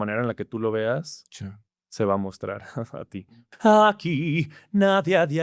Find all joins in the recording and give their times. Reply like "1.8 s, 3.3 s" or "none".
3.4 s